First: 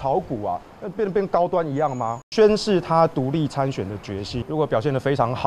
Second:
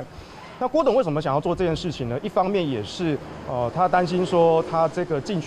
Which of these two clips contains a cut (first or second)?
first